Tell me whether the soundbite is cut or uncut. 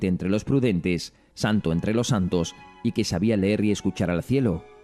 cut